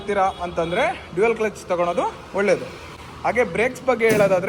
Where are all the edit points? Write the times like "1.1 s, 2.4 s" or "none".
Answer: none